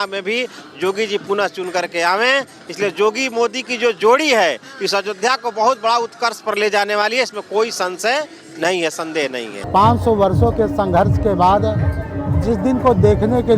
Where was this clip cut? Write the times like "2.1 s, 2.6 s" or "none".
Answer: 9.5 s